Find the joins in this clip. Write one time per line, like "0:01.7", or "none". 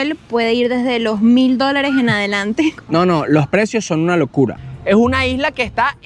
0:02.8
0:04.6